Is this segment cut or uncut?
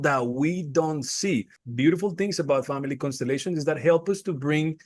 cut